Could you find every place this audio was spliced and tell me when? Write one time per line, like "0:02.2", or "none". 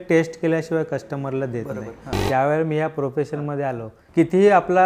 0:02.1
0:03.9

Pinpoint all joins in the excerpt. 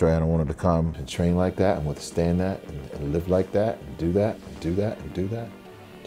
0:01.0

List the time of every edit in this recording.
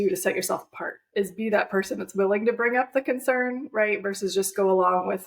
none

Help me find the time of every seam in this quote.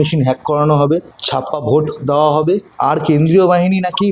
none

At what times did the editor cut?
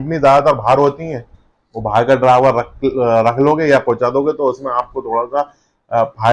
none

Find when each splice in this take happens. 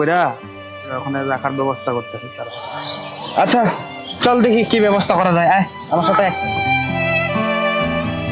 0:06.4

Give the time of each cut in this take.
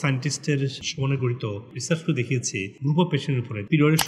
0:01.6
0:02.7

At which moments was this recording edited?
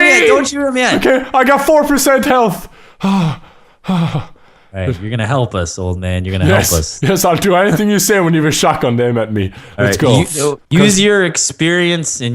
0:06.6

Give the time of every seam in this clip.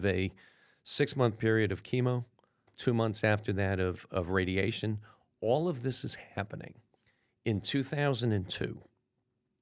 0:02.7

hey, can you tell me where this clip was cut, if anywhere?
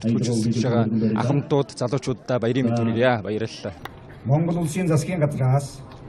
none

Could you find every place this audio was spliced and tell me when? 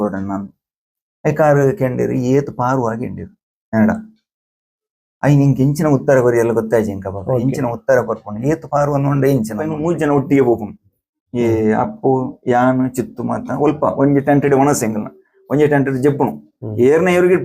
0:09.8

